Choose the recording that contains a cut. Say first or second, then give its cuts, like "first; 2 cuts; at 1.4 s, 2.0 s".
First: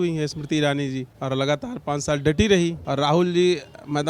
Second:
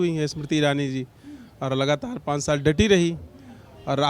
first; 2 cuts; at 1.1 s, 2.8 s